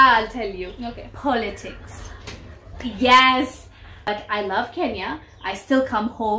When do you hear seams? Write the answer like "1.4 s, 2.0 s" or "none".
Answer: 4.2 s